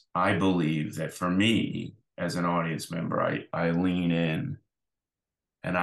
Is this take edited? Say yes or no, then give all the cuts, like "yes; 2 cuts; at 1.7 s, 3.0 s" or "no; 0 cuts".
no; 0 cuts